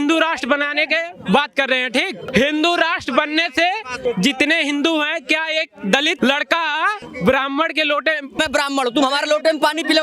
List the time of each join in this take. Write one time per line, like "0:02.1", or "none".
0:02.2
0:03.9
0:06.2
0:07.1
0:08.4